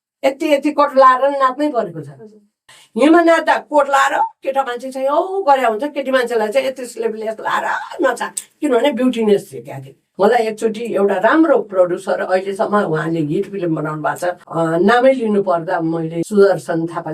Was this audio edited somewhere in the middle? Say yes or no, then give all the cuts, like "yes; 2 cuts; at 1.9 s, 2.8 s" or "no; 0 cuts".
yes; 4 cuts; at 2.6 s, 10.0 s, 14.4 s, 16.2 s